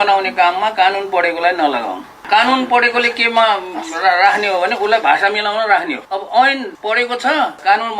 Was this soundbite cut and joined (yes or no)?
yes